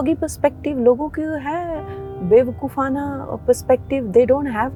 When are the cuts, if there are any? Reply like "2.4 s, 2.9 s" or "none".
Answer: none